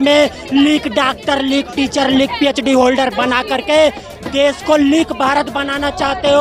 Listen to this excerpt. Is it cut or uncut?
uncut